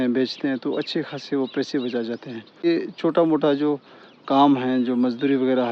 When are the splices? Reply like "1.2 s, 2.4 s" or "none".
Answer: 2.6 s